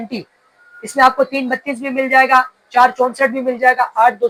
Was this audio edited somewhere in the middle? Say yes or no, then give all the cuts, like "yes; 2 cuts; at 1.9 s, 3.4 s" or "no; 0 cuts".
no; 0 cuts